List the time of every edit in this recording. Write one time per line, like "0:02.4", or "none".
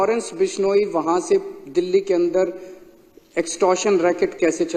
none